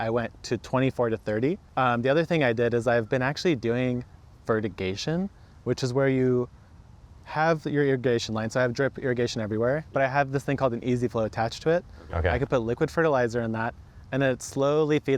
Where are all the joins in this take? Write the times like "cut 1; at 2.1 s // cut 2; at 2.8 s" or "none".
cut 1; at 1.6 s